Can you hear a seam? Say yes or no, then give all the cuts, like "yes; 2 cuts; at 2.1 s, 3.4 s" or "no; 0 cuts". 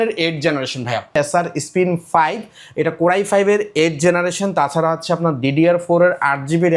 yes; 1 cut; at 1.2 s